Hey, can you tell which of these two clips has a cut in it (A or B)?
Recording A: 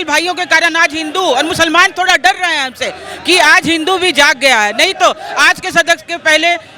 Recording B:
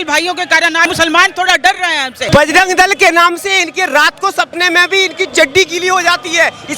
B